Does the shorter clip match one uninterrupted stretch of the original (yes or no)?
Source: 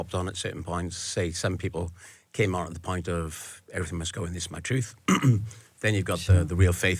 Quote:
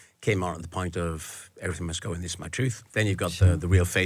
no